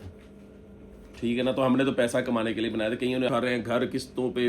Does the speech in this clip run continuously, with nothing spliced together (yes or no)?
no